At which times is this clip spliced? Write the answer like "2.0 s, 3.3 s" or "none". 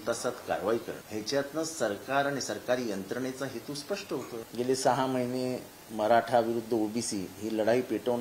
1.0 s, 4.5 s